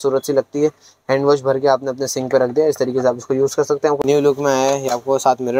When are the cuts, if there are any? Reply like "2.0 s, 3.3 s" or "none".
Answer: 4.0 s